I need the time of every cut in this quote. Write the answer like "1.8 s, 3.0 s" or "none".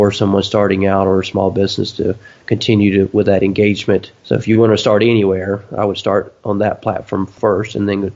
4.1 s, 6.3 s, 7.3 s